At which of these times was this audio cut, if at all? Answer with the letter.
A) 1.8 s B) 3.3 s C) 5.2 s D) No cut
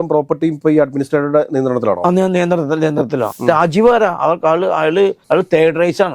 B